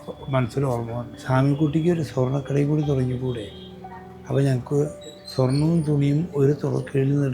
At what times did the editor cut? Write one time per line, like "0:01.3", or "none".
0:01.1